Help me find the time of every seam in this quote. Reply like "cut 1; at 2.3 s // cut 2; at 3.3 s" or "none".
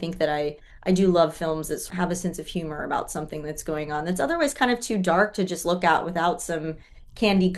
cut 1; at 1.8 s

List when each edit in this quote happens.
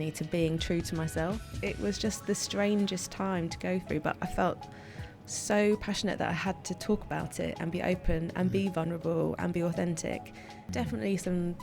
cut 1; at 1.6 s // cut 2; at 10.7 s

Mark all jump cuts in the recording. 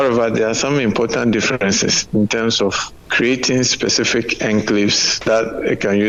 none

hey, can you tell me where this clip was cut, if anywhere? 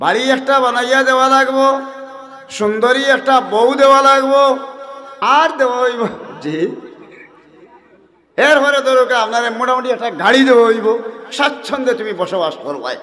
cut 1; at 5.2 s

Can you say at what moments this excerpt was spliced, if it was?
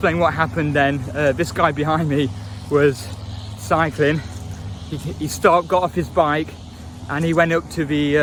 none

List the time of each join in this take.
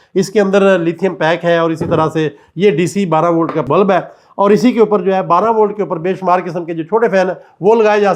none

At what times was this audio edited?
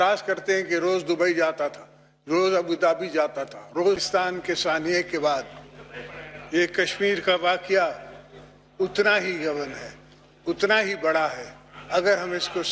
cut 1; at 4.0 s

